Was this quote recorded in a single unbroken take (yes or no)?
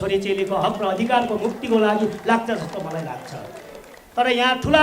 yes